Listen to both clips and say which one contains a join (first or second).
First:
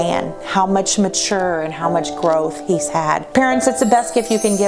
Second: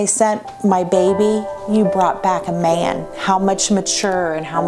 first